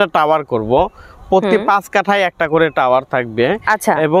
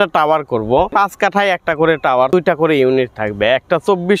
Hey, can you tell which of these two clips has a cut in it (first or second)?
second